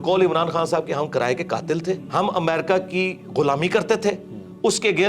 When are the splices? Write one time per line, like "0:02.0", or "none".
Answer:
0:02.0